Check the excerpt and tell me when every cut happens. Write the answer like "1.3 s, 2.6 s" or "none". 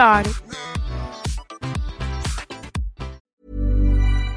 3.2 s